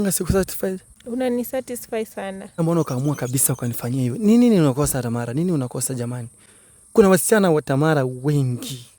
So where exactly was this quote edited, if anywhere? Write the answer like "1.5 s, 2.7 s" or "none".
0.9 s, 2.6 s